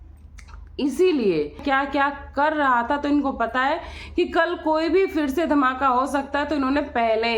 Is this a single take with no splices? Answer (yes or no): no